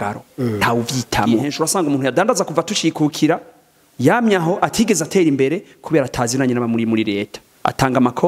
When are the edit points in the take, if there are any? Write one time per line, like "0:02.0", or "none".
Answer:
0:01.5